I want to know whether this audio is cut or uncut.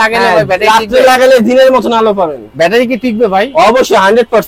uncut